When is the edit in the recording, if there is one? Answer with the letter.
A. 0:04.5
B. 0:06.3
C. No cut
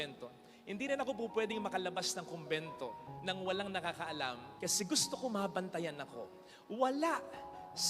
A